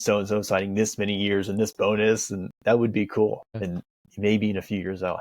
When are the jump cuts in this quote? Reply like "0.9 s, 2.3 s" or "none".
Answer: 3.6 s